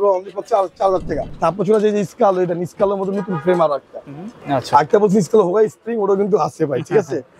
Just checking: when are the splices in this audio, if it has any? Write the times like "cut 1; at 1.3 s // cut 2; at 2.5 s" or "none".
cut 1; at 1.2 s // cut 2; at 4.4 s